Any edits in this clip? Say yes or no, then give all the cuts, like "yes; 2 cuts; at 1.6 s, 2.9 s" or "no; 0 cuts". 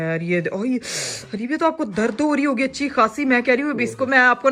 no; 0 cuts